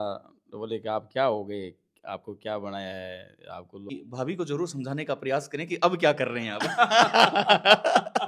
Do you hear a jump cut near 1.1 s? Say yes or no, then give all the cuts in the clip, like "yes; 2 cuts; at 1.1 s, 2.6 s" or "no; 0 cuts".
no; 1 cut; at 3.9 s